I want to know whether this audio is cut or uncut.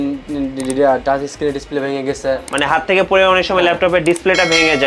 uncut